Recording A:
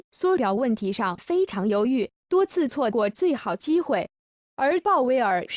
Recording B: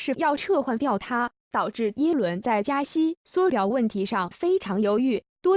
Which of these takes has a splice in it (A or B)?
A